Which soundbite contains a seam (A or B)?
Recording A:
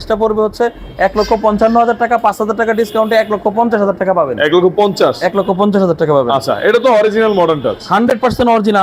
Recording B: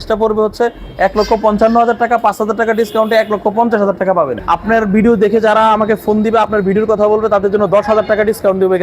B